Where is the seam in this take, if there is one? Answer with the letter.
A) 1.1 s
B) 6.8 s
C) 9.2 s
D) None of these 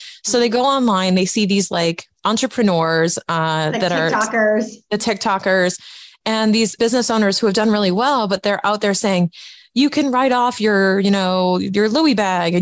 B